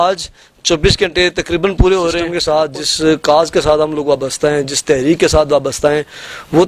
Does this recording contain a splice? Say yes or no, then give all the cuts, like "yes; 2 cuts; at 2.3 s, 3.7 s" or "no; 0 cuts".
yes; 1 cut; at 2.3 s